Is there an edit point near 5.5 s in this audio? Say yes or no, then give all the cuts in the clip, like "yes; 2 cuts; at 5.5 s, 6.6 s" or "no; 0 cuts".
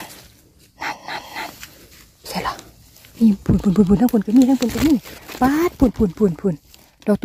no; 0 cuts